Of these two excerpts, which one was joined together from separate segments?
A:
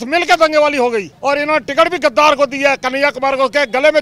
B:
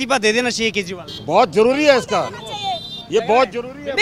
A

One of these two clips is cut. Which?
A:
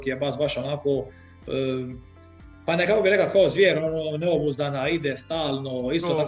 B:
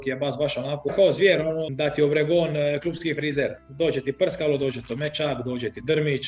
B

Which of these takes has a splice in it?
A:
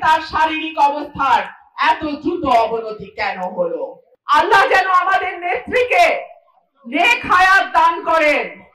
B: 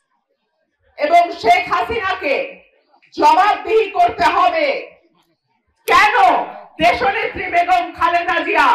A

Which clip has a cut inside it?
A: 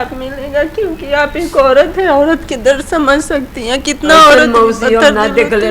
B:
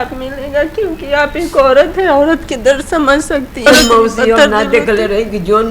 B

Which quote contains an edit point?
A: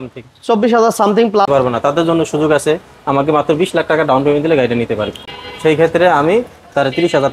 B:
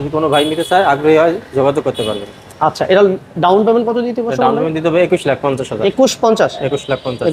A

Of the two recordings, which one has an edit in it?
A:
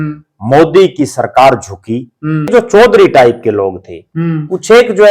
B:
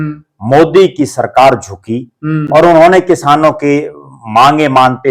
A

